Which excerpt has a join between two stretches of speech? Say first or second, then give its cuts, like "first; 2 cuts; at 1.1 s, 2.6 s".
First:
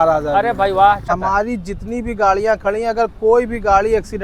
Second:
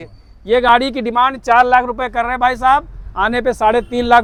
first; 1 cut; at 1.1 s